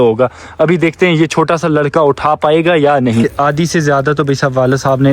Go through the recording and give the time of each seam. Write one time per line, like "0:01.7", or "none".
0:03.3